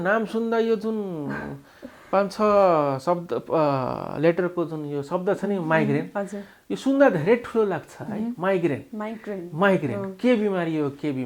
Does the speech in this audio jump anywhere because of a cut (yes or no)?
no